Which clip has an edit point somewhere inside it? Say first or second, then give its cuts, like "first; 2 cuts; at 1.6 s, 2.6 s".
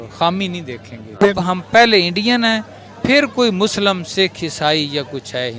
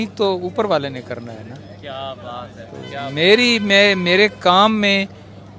first; 1 cut; at 1.2 s